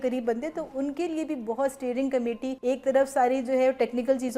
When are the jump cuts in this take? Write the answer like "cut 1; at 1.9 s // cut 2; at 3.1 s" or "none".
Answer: cut 1; at 2.5 s